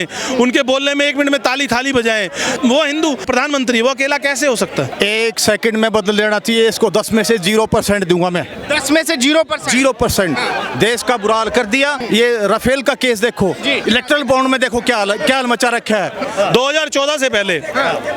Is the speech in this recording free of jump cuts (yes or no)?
no